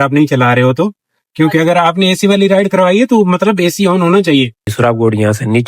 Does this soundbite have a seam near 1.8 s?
no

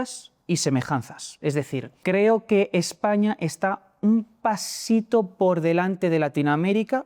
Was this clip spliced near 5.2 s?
no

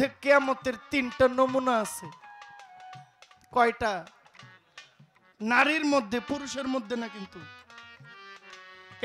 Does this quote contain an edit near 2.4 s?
no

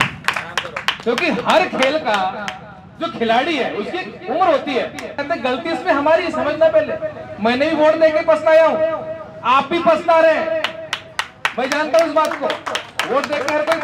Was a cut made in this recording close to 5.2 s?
yes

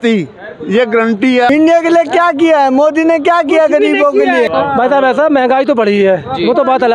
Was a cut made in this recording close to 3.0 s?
no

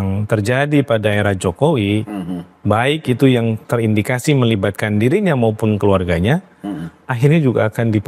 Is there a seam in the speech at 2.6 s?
no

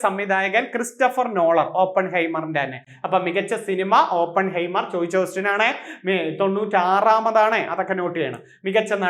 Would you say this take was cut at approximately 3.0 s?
no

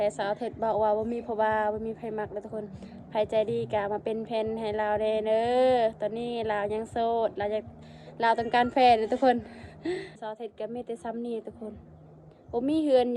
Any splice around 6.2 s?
no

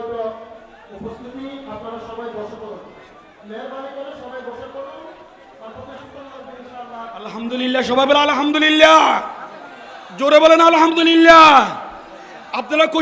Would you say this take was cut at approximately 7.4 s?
yes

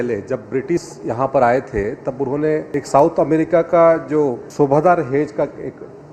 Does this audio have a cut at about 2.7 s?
yes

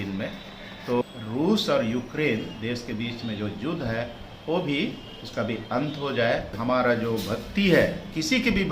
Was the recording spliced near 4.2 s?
no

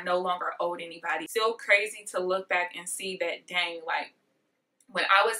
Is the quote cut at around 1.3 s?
yes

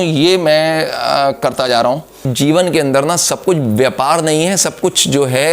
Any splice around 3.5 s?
no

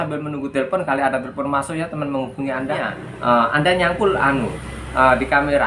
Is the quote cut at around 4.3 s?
no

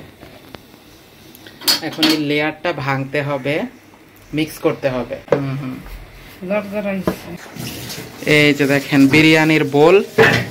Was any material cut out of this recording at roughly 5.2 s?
yes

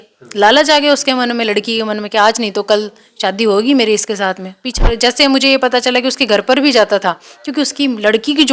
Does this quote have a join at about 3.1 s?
no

